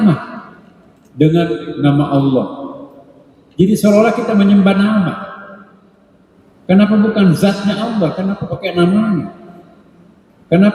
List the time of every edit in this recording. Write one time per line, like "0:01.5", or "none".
none